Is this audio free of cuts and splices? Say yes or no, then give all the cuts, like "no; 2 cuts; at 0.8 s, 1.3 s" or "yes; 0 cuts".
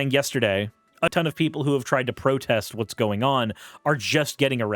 no; 1 cut; at 1.1 s